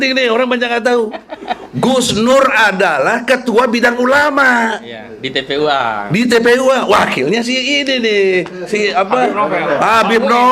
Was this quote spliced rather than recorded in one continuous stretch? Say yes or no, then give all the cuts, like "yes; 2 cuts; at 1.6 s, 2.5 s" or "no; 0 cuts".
no; 0 cuts